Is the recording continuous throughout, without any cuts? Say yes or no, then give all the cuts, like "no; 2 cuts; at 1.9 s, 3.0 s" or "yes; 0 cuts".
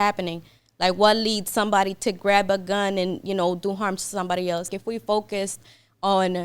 no; 1 cut; at 4.7 s